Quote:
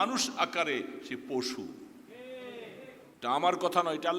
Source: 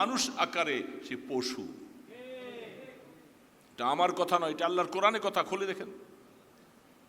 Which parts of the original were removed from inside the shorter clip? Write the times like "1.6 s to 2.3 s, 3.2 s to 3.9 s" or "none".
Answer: 3.0 s to 3.6 s